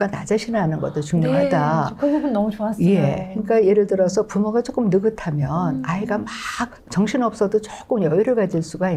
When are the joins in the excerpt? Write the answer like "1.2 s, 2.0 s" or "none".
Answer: none